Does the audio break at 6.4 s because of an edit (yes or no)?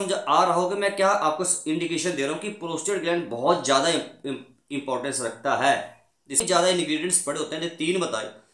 yes